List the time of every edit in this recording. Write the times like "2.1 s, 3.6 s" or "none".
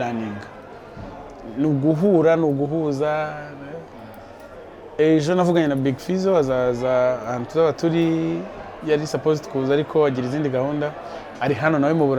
none